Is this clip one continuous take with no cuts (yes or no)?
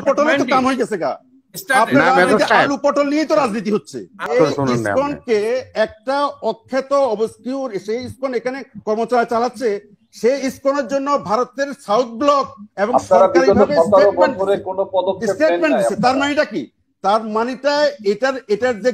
no